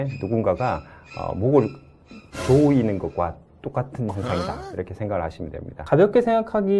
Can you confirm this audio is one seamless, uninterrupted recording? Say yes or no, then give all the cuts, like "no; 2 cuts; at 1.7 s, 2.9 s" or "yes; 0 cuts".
no; 1 cut; at 5.8 s